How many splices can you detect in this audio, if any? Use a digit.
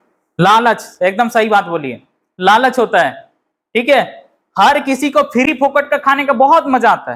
0